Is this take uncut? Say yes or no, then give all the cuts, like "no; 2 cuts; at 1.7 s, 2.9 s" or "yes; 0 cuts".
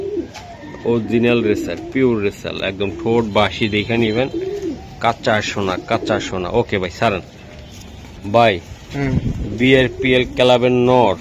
yes; 0 cuts